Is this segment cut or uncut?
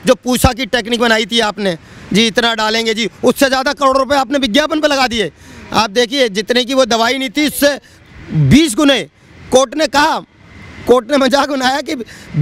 uncut